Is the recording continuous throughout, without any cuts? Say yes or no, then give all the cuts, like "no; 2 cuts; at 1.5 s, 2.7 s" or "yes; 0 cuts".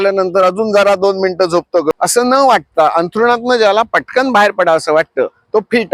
no; 1 cut; at 1.9 s